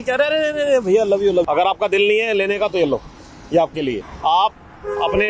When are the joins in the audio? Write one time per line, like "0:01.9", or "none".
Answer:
0:01.4
0:04.1

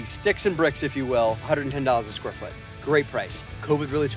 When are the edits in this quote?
none

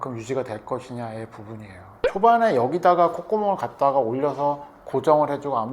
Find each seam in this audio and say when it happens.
0:01.9

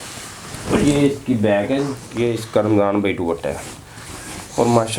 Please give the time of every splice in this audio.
0:02.0

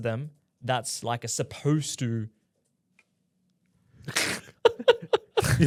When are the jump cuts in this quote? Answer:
none

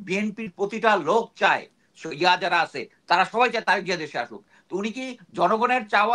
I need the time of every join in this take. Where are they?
none

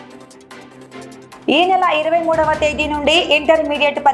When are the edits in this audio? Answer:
0:01.4

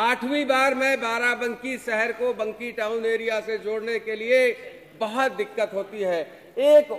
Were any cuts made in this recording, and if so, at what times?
none

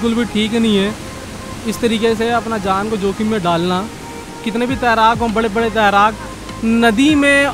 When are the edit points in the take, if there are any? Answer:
0:04.3

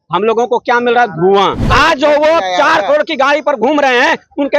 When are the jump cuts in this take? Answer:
0:01.6

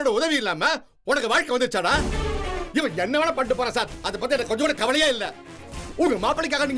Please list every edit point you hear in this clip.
0:02.6

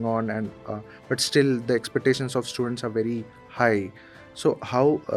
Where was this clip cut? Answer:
none

